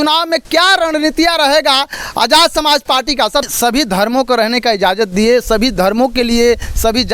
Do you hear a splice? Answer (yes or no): yes